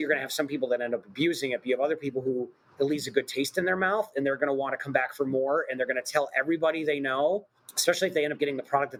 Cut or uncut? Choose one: uncut